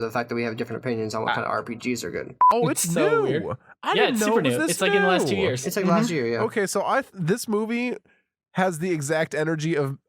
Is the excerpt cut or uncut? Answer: cut